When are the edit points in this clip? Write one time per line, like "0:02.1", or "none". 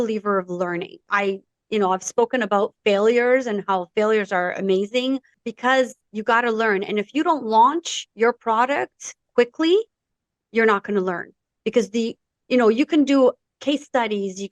0:01.0
0:05.4
0:06.1

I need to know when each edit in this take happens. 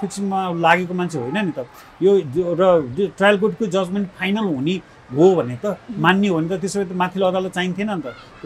none

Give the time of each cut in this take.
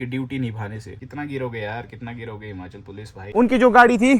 0:01.0
0:03.2

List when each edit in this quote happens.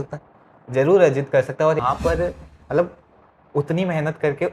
0:01.8

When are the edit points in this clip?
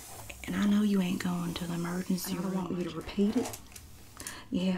0:02.6

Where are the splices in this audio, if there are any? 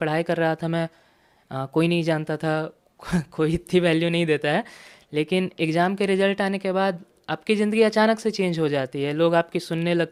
none

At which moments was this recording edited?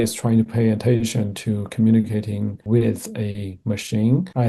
0:02.6

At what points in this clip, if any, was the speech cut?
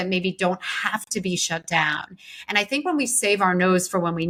none

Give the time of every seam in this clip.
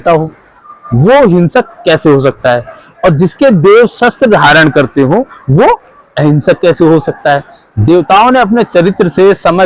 none

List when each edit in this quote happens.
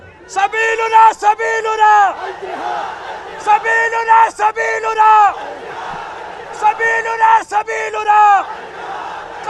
none

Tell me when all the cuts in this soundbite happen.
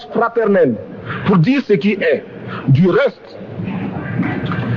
none

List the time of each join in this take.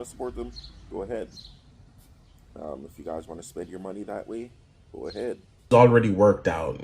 0:05.7

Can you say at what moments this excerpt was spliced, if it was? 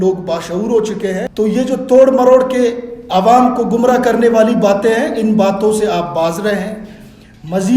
0:01.2

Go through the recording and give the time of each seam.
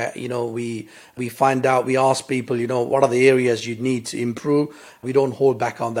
0:01.1
0:02.9
0:05.0

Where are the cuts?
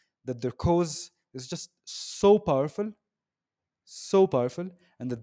none

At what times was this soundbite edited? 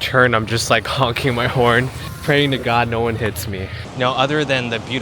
0:02.0
0:03.8

